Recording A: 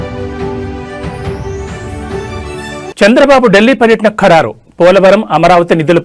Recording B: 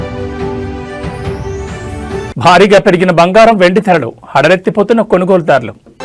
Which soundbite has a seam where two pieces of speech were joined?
A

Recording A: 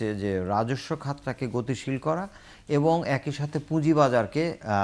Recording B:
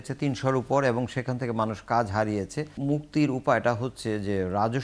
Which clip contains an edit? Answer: B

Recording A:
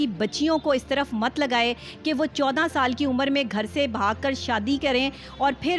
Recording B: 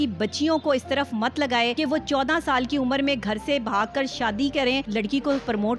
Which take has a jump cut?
B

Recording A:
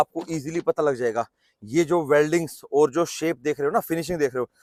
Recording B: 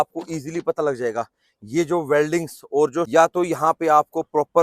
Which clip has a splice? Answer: B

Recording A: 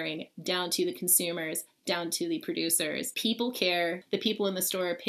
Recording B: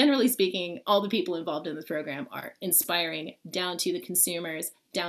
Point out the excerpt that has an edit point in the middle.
A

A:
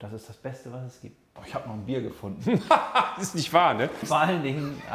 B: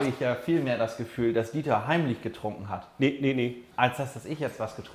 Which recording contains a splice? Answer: A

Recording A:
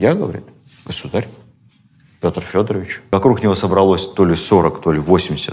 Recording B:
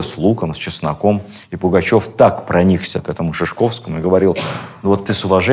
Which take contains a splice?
A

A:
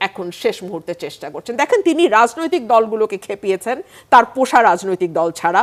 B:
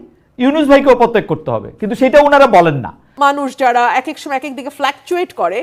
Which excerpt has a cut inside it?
B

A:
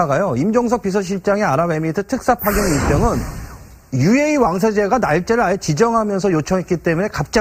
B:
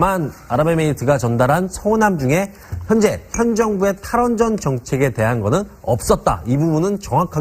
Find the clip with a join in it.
B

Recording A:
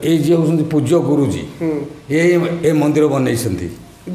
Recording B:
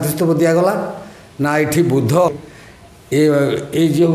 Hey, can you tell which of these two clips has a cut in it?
B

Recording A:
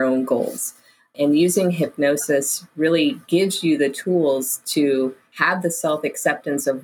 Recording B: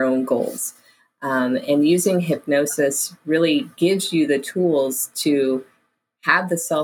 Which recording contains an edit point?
A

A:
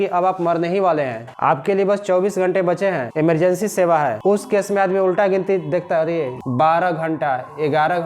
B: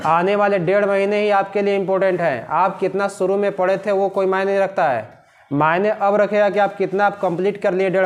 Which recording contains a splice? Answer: A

